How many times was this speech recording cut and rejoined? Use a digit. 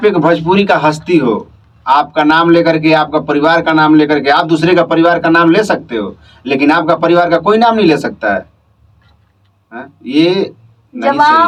0